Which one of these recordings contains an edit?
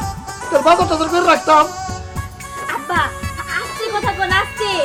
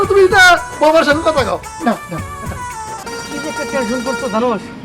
second; 1 cut; at 3.0 s

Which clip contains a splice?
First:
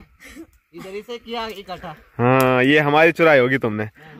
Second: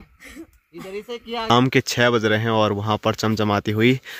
second; 1 cut; at 1.5 s

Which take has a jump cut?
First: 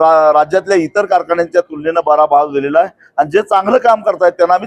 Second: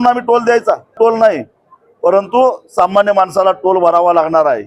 second; 1 cut; at 1.0 s

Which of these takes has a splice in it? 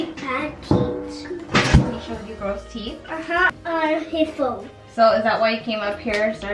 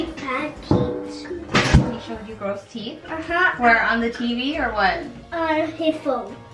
first; 1 cut; at 3.5 s

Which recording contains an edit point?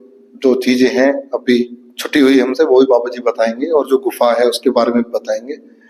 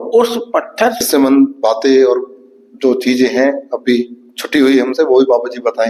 second; 1 cut; at 1.0 s

